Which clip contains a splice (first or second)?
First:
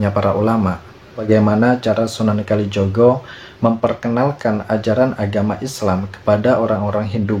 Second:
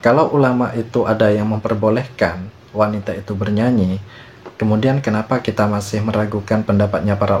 first